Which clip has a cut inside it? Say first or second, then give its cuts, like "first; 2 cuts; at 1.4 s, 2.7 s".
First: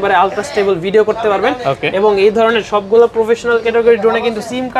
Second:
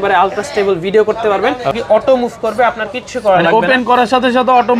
second; 1 cut; at 1.8 s